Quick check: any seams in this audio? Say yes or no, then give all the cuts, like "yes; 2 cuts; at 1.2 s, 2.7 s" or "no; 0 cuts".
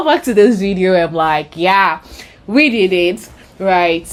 no; 0 cuts